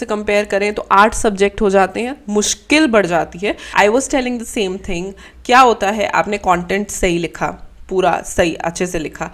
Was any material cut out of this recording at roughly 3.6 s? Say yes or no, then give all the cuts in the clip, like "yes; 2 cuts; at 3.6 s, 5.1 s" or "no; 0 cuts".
yes; 1 cut; at 3.6 s